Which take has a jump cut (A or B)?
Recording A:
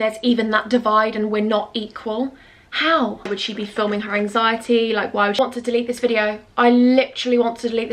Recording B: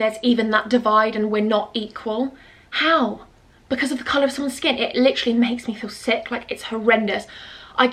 A